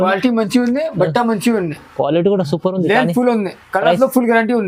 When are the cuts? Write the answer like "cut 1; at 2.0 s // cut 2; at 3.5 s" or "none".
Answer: none